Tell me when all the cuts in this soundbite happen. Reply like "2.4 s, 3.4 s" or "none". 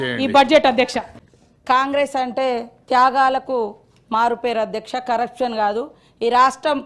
1.4 s